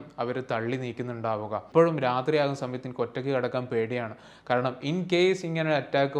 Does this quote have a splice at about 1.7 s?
yes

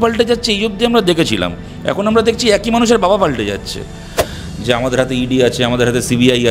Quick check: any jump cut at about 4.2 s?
yes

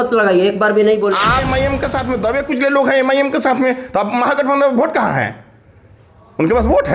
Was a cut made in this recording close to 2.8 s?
no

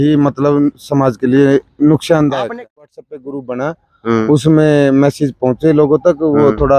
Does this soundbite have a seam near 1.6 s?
no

